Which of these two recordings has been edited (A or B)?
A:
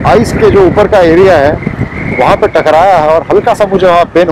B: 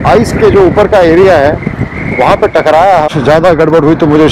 B